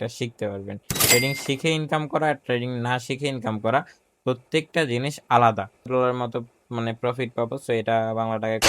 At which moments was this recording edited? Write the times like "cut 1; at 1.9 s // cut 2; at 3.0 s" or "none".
cut 1; at 5.9 s